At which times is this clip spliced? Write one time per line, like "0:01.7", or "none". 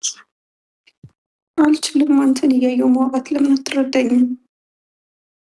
none